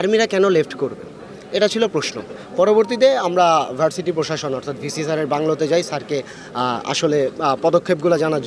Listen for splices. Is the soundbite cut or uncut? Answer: uncut